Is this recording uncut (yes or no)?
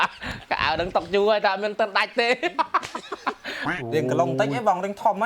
no